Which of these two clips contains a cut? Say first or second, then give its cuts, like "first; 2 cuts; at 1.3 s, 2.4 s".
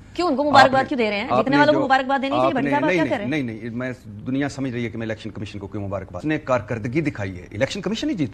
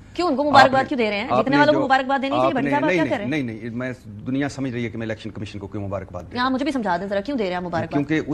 first; 1 cut; at 6.2 s